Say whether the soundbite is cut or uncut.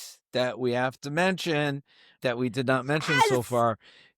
cut